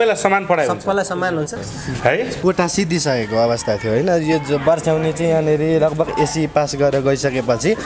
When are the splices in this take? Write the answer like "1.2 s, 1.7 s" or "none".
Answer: 1.7 s, 2.4 s